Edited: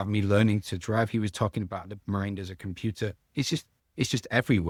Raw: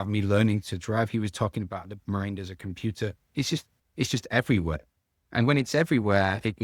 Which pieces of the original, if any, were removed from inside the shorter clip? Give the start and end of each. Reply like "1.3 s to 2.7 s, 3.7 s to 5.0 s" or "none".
none